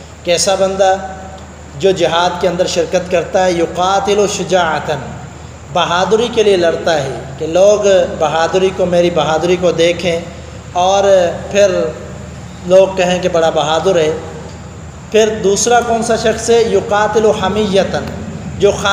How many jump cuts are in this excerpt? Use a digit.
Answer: 0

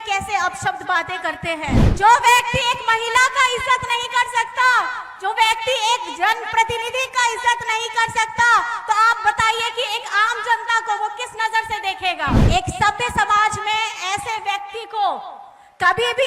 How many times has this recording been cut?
2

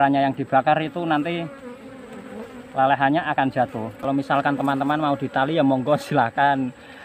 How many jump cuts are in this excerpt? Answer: 1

